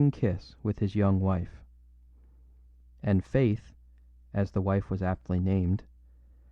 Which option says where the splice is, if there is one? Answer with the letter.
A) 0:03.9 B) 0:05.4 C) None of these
B